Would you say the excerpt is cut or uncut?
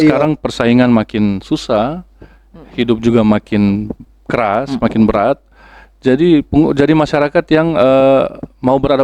uncut